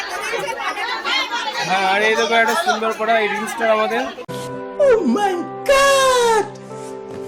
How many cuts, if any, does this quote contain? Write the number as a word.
zero